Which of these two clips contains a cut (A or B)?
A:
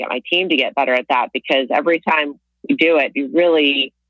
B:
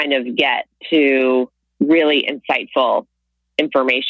B